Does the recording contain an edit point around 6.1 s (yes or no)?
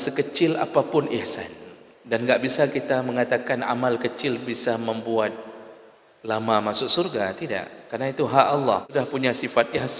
no